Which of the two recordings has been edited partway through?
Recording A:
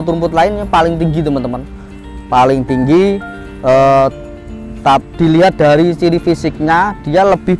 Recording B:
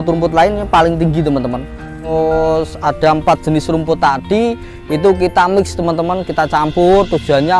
B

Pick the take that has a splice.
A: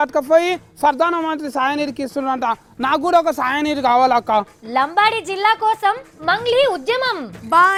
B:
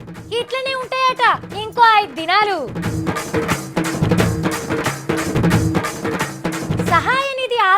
B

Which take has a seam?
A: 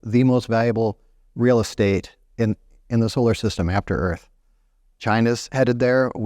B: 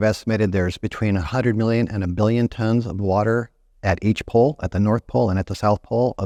A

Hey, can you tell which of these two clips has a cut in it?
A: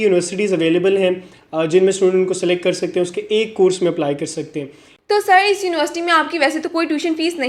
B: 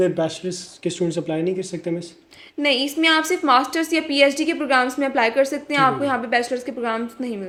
A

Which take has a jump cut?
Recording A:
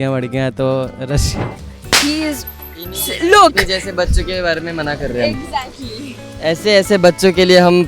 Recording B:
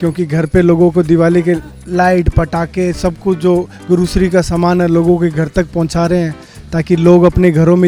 A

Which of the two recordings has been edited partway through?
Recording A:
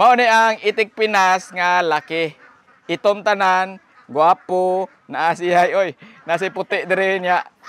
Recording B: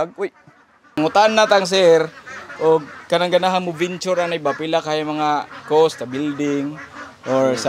B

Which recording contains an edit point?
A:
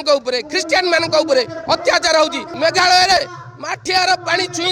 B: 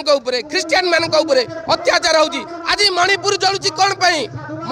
A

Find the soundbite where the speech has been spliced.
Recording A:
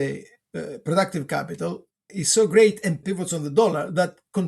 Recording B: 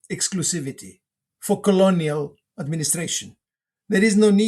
A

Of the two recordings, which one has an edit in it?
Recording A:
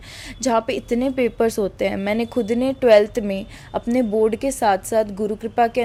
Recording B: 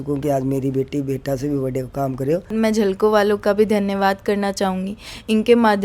B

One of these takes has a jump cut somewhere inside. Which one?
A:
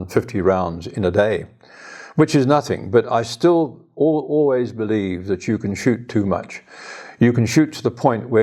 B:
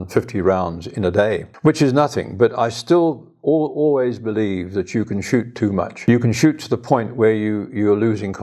B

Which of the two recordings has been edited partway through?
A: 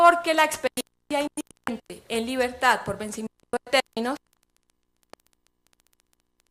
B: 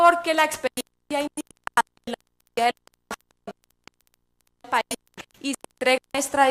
B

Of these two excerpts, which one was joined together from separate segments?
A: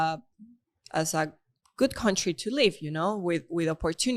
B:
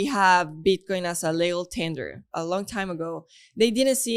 B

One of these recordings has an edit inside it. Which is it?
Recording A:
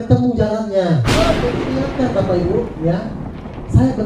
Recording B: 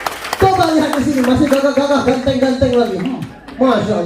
A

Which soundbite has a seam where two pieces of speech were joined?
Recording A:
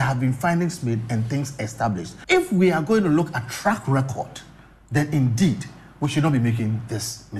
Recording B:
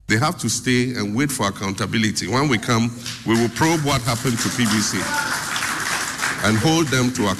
A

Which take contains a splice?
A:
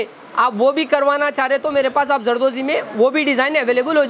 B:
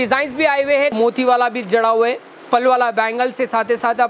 B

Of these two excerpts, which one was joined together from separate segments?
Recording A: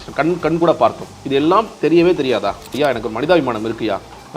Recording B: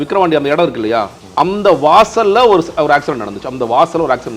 A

